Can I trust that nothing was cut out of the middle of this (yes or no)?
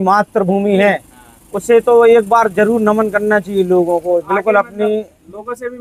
yes